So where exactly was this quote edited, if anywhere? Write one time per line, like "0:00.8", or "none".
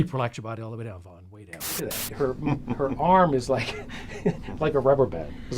0:01.8